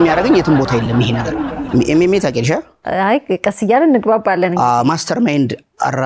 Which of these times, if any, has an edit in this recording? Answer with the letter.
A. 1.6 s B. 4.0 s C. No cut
A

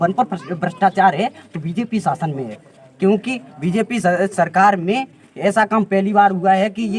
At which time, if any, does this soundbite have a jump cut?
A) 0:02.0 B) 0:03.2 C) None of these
C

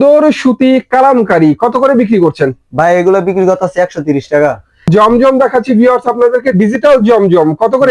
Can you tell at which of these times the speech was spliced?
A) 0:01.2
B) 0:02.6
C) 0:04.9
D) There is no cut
C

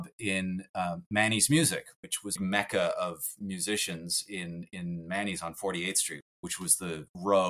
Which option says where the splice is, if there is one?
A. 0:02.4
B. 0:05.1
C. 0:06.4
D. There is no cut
A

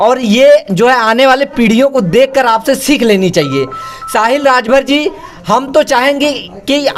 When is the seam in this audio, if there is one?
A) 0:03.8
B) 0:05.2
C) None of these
C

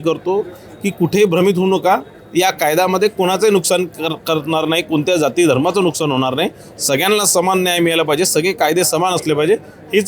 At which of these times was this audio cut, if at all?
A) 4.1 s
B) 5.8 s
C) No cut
C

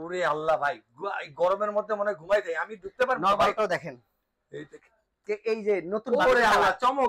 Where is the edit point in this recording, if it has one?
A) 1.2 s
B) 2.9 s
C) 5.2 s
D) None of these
C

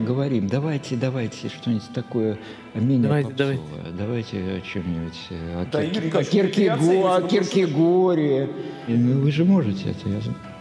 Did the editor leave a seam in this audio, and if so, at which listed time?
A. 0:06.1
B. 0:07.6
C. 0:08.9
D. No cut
C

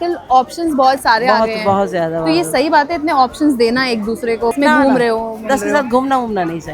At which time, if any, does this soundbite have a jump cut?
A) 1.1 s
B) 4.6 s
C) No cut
B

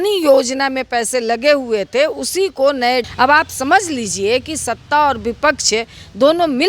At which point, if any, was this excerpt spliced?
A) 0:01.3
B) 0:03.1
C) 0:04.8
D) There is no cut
B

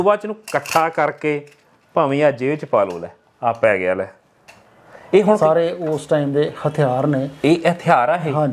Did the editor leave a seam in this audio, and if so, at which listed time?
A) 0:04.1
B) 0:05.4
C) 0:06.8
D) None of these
B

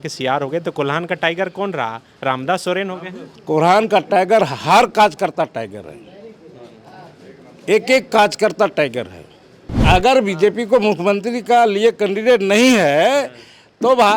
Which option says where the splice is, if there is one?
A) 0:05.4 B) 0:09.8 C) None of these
B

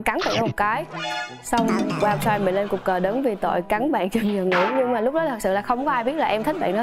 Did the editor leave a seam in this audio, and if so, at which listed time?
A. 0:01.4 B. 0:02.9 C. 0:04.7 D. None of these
D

